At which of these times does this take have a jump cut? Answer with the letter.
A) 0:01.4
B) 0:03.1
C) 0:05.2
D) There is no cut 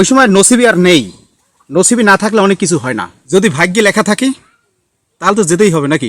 B